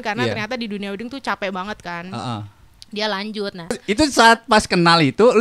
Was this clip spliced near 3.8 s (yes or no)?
yes